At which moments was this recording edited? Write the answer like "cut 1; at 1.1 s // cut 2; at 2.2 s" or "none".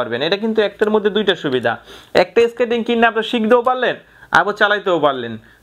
none